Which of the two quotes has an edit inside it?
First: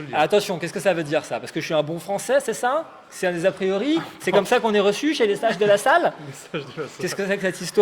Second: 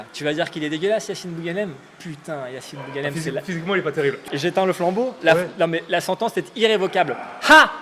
second; 1 cut; at 4.2 s

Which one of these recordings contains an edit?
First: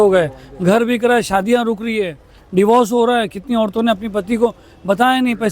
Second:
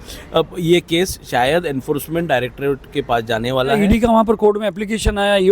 second; 1 cut; at 3.8 s

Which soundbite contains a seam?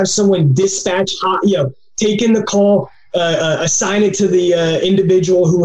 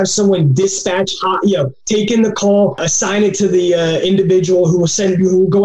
second; 2 cuts; at 1.8 s, 2.9 s

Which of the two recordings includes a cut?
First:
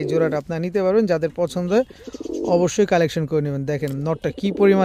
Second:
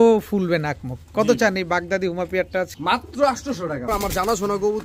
second; 2 cuts; at 2.7 s, 3.9 s

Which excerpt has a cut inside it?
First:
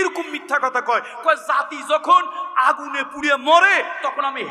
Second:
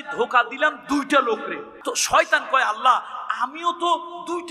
second; 1 cut; at 1.7 s

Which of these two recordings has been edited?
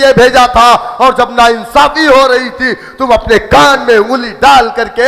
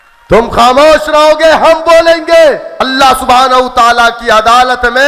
second; 1 cut; at 2.7 s

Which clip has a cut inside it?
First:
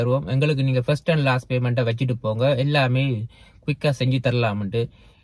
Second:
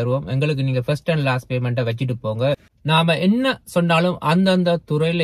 second; 1 cut; at 2.6 s

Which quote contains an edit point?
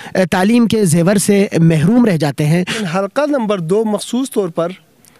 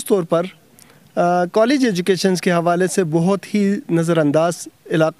first; 1 cut; at 2.9 s

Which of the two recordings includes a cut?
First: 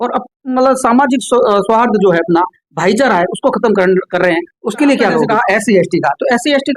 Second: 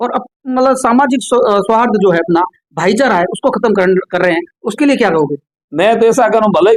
first; 1 cut; at 5.3 s

